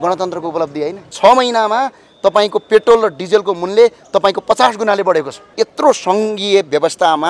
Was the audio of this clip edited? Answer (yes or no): yes